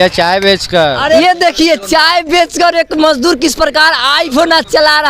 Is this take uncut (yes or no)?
no